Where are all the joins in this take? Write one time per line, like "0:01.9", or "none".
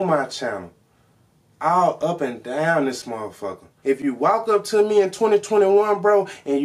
0:03.7